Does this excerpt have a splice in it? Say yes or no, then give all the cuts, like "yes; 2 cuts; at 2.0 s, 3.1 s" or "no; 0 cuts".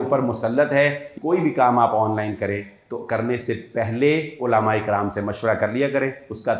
yes; 1 cut; at 1.0 s